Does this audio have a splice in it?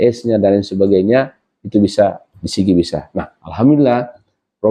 no; 0 cuts

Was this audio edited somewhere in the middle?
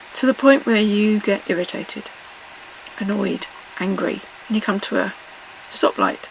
yes; 1 cut; at 4.3 s

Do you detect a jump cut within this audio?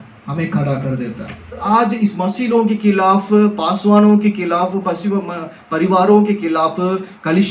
yes; 1 cut; at 1.6 s

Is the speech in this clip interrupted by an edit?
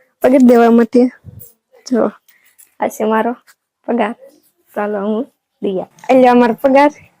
yes; 1 cut; at 5.9 s

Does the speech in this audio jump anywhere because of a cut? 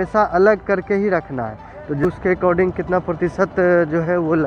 yes; 1 cut; at 2.0 s

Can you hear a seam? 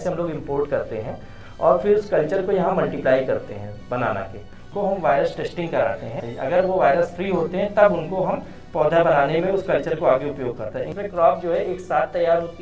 yes; 3 cuts; at 4.6 s, 6.2 s, 10.9 s

